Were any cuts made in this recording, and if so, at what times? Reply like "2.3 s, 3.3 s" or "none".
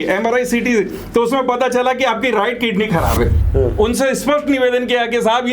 3.4 s